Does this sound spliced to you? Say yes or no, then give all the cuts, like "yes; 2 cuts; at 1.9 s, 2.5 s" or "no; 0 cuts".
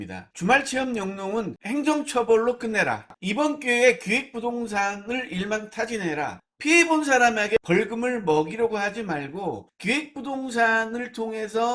yes; 1 cut; at 3.1 s